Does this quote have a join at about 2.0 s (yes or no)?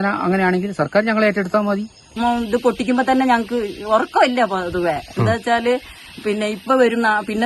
yes